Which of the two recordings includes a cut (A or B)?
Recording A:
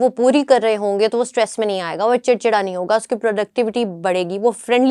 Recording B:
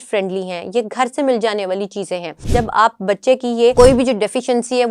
B